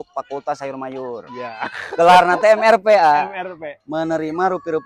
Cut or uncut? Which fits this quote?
uncut